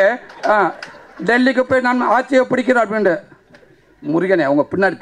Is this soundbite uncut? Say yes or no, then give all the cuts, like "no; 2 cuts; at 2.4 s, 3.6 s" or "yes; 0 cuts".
yes; 0 cuts